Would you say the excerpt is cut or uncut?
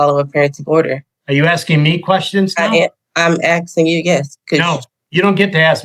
cut